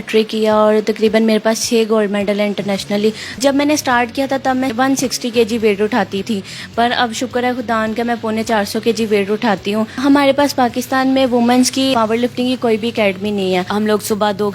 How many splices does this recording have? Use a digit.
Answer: 6